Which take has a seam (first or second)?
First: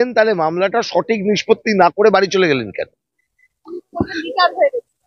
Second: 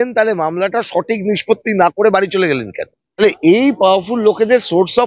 second